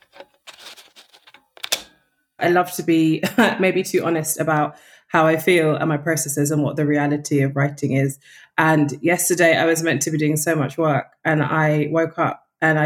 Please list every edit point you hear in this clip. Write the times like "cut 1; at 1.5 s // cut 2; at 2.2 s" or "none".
cut 1; at 2.4 s